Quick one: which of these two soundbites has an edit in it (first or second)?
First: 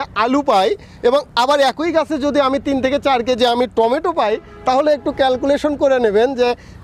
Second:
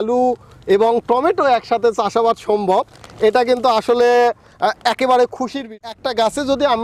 second